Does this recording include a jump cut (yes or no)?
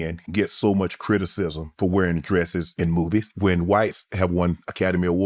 no